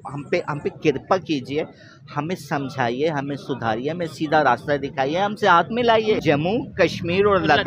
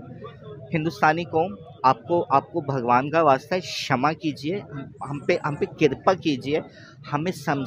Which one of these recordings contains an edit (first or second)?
first